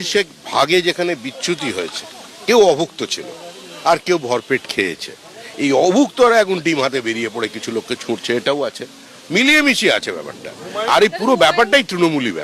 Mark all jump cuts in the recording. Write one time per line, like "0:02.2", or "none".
none